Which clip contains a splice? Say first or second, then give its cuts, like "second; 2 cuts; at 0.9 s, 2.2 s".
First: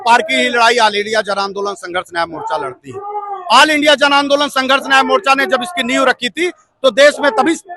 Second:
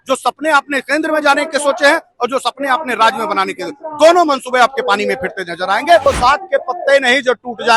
second; 1 cut; at 6.1 s